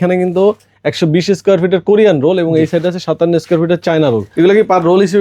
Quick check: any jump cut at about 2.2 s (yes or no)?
no